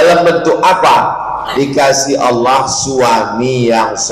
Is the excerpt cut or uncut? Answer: uncut